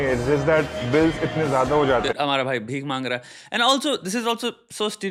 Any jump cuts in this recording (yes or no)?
no